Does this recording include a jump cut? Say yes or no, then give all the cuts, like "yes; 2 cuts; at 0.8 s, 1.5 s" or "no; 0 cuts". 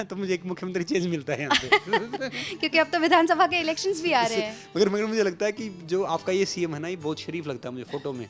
no; 0 cuts